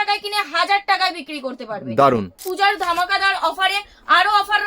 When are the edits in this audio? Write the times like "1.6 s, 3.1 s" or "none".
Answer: 2.4 s